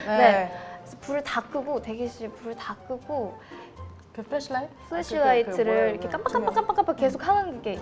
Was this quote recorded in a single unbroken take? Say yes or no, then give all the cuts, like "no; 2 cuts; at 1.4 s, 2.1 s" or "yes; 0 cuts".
yes; 0 cuts